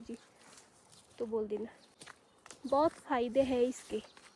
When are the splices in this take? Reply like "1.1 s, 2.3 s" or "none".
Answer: 2.0 s